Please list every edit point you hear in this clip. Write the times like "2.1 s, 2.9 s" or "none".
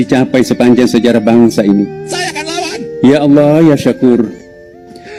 none